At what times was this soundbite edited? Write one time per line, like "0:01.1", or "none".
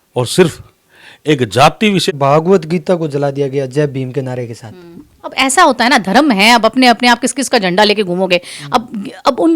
0:02.1